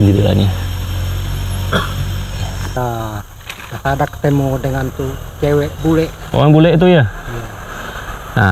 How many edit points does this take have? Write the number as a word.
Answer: one